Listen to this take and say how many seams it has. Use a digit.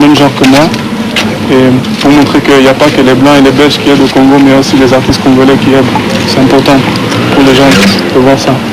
1